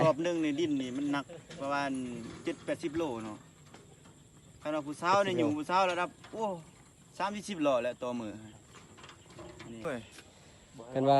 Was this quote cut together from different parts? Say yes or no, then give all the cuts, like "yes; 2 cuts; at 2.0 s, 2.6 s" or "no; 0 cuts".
yes; 1 cut; at 9.8 s